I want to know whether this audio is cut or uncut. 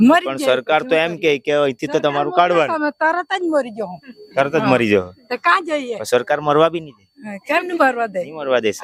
uncut